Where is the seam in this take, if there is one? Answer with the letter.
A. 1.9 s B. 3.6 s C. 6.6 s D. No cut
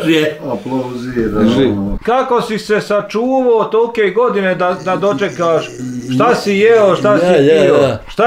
A